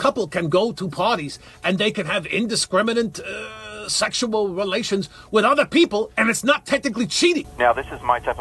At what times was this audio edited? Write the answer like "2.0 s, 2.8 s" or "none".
7.5 s